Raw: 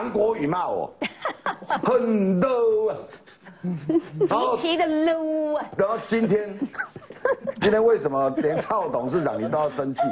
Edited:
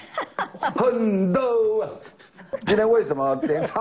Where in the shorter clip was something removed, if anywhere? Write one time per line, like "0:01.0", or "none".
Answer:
0:02.5